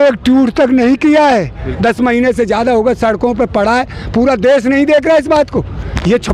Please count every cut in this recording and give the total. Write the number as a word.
one